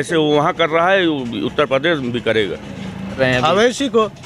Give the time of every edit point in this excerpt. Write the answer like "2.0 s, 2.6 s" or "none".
3.2 s